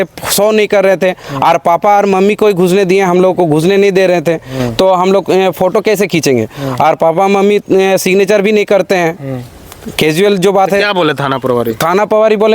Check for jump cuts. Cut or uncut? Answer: uncut